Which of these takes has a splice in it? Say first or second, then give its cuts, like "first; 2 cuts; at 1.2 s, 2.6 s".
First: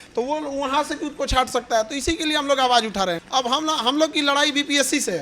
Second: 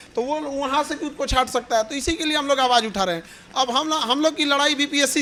first; 1 cut; at 3.2 s